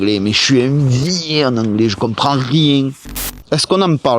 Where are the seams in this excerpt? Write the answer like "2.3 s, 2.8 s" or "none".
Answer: 3.2 s